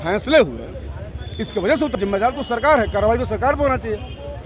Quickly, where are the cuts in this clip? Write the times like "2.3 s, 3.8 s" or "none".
1.9 s